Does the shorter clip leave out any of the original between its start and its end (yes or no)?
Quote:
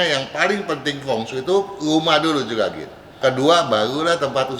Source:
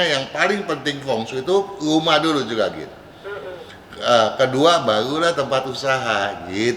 yes